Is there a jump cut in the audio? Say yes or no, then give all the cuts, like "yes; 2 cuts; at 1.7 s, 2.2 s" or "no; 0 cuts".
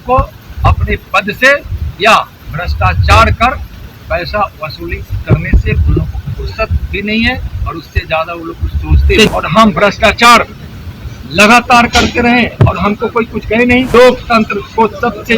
yes; 2 cuts; at 9.3 s, 13.9 s